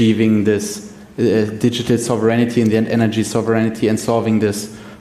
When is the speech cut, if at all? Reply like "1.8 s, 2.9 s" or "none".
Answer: none

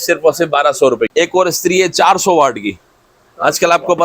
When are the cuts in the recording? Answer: 1.1 s

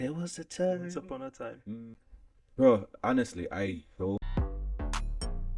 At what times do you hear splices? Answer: 2.0 s, 4.3 s

